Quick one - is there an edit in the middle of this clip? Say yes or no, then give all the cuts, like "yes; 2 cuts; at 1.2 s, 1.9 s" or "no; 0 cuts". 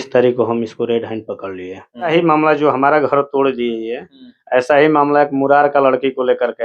yes; 1 cut; at 2.1 s